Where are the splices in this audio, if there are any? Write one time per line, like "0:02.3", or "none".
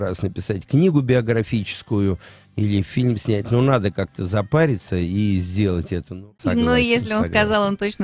0:06.1